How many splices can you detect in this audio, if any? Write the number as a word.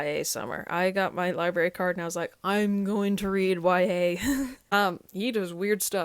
one